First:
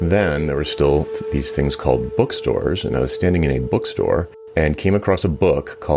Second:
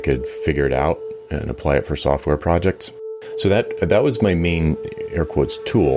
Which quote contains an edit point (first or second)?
first